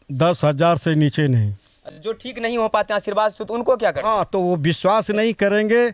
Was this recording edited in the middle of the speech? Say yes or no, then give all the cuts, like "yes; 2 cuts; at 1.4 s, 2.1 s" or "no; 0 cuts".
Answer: no; 0 cuts